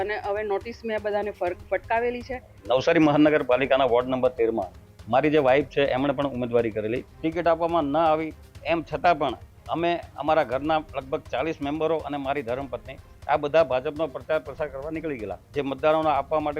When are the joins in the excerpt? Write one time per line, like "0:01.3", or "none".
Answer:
0:02.5
0:07.1
0:15.4

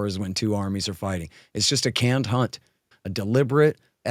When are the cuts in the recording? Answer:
0:02.8

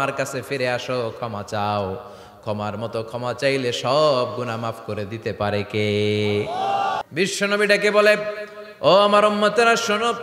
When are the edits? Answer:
0:07.1

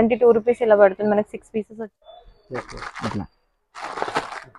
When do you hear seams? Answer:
0:01.7

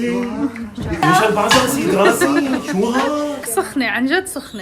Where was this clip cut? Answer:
0:01.0

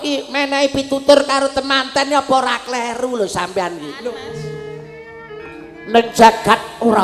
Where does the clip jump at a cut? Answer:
0:04.0

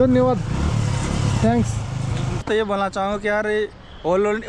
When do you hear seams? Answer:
0:02.4

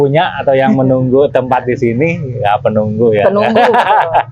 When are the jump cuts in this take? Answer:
none

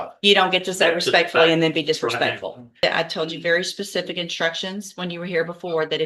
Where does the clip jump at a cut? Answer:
0:02.8

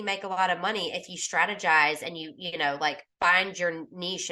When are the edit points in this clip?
none

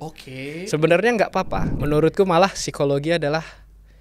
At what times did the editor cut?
0:01.7

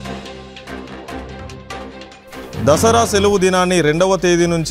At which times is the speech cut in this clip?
0:02.1

